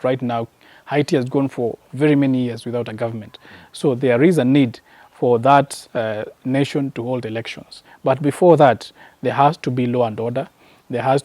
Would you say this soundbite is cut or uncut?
uncut